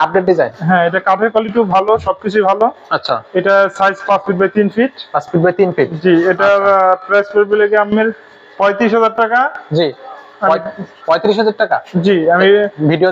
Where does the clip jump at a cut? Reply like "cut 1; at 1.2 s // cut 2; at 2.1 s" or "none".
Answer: none